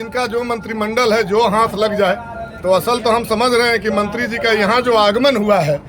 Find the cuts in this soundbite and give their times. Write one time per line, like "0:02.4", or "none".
none